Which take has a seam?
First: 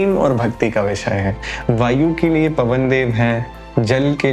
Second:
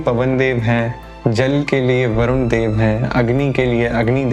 first; 1 cut; at 1.4 s

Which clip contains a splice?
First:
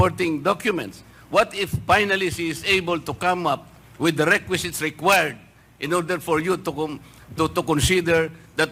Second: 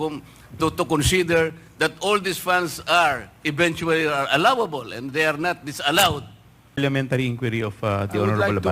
second; 1 cut; at 6.8 s

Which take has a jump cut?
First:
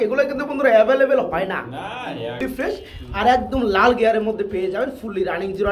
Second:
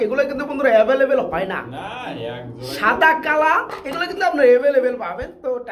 first; 1 cut; at 2.4 s

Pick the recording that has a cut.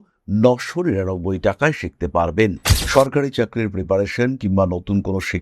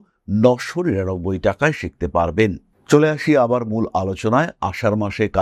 first; 1 cut; at 2.7 s

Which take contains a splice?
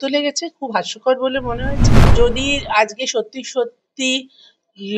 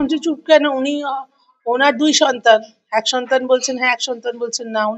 first; 1 cut; at 2.1 s

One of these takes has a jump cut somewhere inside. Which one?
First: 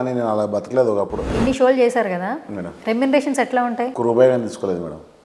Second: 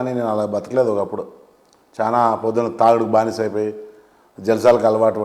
first; 2 cuts; at 1.3 s, 3.9 s

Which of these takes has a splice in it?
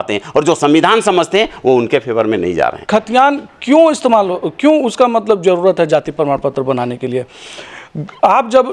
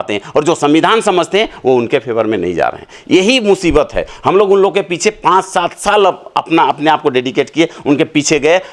first; 1 cut; at 2.8 s

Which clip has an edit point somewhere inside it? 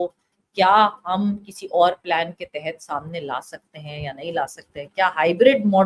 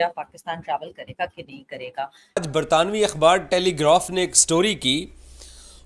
second; 1 cut; at 2.2 s

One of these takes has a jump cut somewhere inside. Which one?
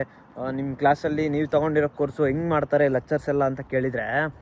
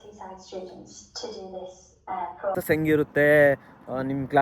second; 1 cut; at 2.5 s

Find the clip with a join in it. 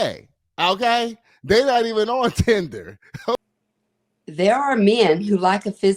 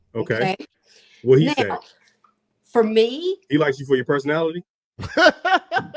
first; 1 cut; at 3.4 s

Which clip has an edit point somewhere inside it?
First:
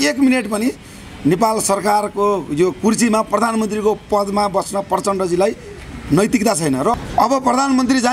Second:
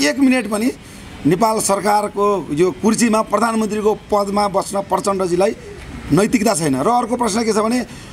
first; 1 cut; at 6.9 s

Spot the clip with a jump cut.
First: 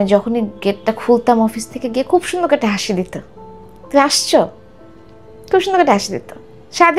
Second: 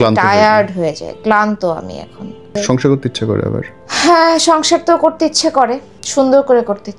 second; 3 cuts; at 2.5 s, 3.8 s, 6.0 s

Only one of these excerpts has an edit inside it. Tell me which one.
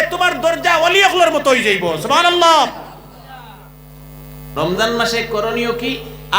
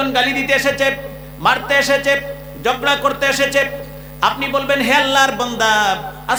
first; 1 cut; at 4.4 s

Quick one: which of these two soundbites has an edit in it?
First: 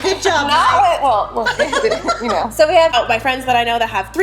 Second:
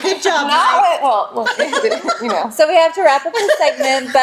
first; 1 cut; at 2.9 s

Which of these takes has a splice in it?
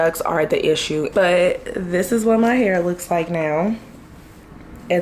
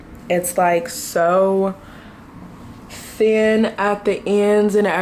first; 1 cut; at 1.1 s

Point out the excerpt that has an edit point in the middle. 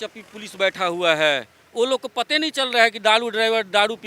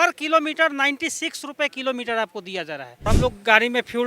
second; 1 cut; at 3.1 s

